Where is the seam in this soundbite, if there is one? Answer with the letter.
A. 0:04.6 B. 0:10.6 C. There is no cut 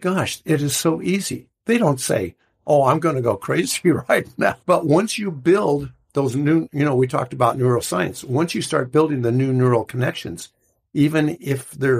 A